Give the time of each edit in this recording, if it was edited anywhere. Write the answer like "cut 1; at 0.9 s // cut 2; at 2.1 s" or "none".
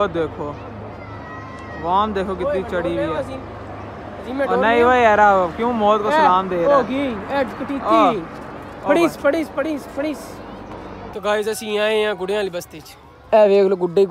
none